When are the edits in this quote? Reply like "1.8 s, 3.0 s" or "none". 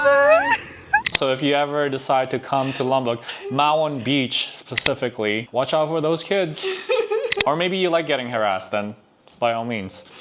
1.1 s, 5.4 s